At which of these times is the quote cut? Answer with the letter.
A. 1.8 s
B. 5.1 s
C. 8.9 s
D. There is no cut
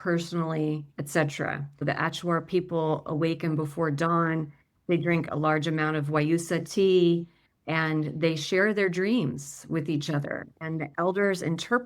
A